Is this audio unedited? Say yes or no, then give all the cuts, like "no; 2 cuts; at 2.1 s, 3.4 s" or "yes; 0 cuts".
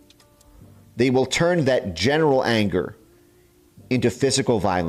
yes; 0 cuts